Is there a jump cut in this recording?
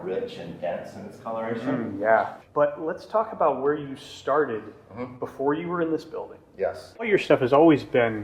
yes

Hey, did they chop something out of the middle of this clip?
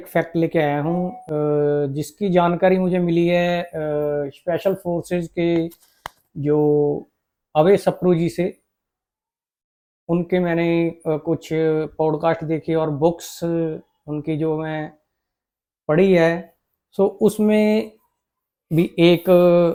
no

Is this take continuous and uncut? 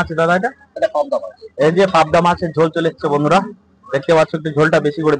yes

